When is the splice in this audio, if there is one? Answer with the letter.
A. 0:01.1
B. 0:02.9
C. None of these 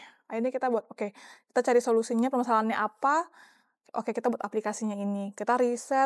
C